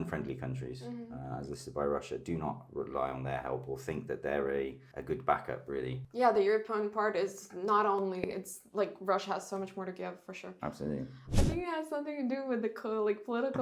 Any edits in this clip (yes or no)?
yes